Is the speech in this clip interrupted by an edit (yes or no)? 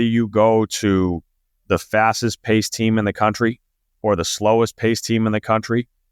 no